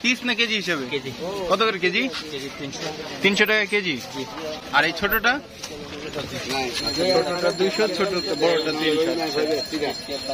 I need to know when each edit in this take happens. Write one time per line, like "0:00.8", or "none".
none